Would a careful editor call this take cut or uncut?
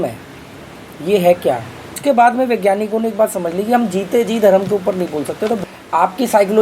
cut